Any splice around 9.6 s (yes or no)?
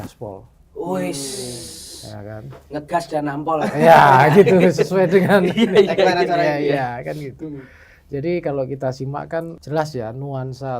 yes